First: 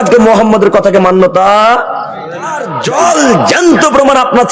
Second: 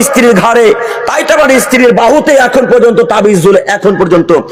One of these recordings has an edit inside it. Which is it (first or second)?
first